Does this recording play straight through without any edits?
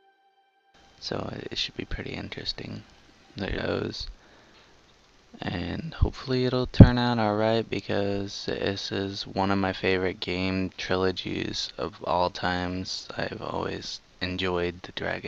yes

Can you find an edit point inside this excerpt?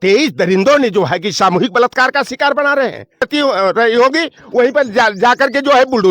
yes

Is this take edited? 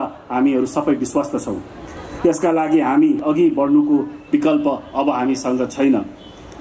yes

